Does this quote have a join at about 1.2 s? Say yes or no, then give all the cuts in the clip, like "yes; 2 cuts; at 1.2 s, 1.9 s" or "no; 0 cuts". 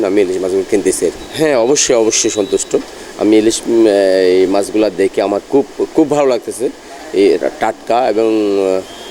no; 0 cuts